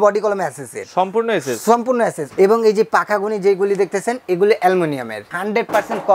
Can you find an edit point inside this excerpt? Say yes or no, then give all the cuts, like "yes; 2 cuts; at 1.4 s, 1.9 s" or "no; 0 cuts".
yes; 2 cuts; at 2.2 s, 5.2 s